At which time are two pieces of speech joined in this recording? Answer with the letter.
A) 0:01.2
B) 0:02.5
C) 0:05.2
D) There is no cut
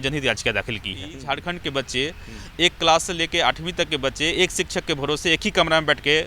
A